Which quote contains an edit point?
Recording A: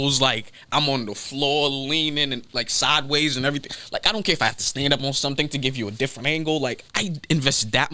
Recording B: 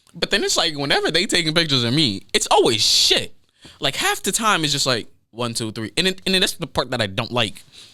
A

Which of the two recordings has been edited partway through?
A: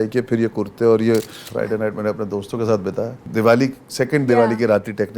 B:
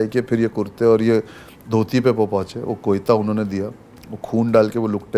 A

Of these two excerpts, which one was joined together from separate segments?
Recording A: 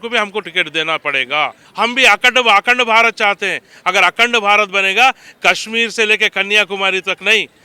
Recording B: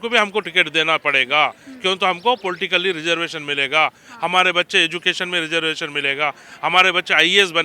A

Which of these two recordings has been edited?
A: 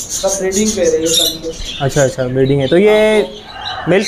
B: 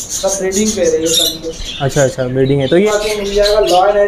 B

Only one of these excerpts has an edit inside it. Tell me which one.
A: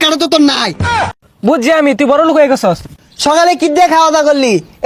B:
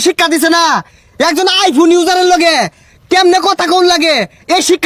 A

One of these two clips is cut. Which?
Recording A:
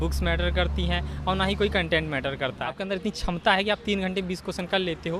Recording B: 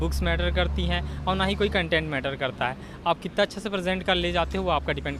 A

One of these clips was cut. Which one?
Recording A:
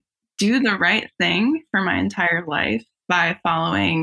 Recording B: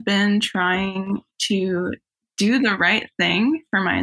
A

